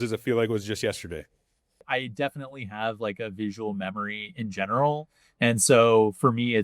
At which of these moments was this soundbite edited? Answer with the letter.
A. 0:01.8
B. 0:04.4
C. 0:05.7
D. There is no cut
A